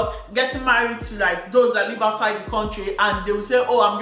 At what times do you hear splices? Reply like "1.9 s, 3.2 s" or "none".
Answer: none